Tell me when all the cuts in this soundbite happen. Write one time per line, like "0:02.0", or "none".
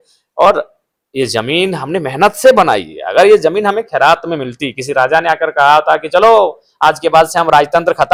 none